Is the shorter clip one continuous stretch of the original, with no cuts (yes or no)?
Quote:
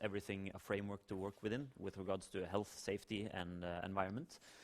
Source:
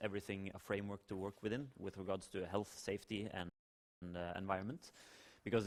no